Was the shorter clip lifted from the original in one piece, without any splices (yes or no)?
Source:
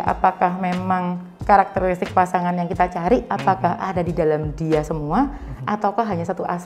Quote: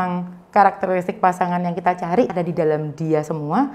no